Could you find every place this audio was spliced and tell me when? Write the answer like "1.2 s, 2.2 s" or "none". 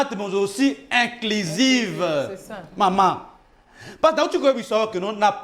none